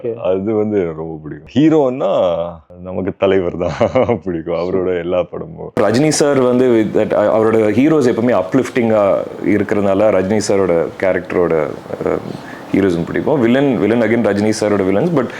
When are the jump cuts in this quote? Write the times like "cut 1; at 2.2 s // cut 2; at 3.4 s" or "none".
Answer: cut 1; at 5.8 s

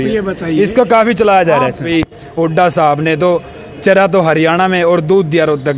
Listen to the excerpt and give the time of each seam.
cut 1; at 1.9 s

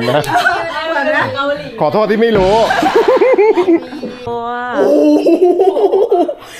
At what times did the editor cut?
cut 1; at 4.2 s

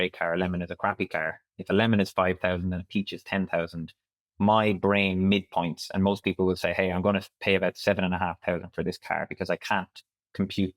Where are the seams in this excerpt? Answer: none

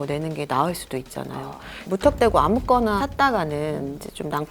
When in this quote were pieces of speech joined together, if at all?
cut 1; at 1.8 s // cut 2; at 3.0 s

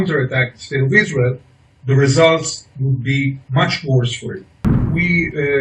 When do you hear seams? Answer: cut 1; at 4.7 s

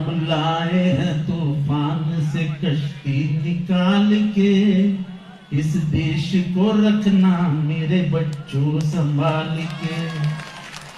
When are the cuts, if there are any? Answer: none

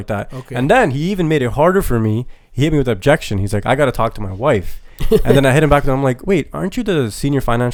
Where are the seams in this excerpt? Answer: none

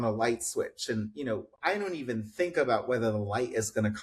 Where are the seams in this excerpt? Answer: none

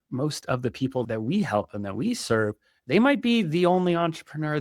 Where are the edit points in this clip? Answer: cut 1; at 1.0 s

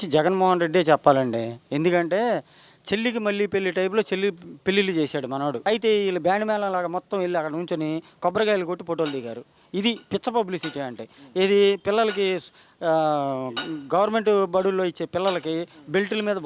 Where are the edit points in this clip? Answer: cut 1; at 5.6 s

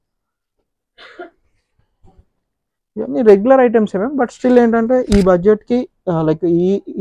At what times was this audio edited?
none

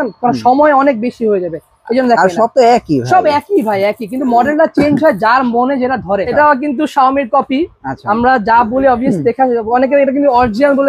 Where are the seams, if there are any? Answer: cut 1; at 6.3 s

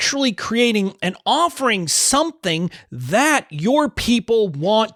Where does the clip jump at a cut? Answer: none

